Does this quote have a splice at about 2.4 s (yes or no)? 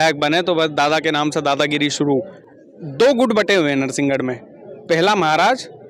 yes